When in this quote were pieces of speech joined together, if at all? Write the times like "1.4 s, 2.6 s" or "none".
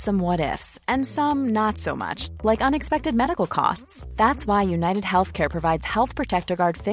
none